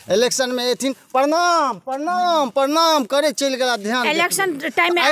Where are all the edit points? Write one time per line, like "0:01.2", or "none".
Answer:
none

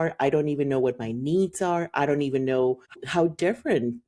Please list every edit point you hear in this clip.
0:03.0

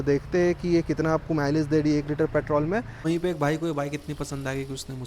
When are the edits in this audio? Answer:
0:03.0

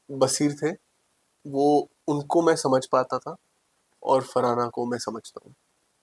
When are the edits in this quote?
none

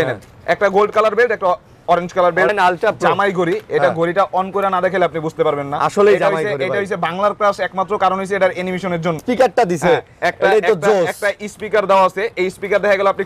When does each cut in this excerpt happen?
0:02.5
0:09.2

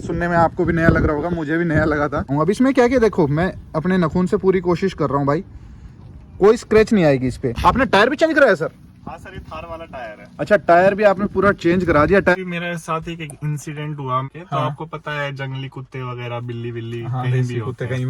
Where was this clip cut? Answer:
0:02.3
0:07.5
0:12.3
0:14.3

